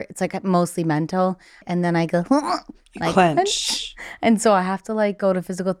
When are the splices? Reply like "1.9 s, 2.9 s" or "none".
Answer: 1.6 s